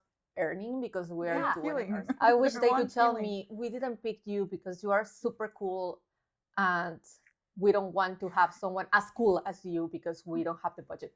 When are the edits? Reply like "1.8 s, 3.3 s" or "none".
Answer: 1.6 s